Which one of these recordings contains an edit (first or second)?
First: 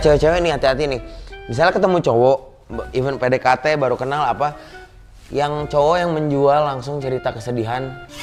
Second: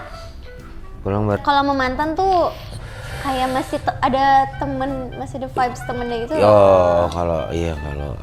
second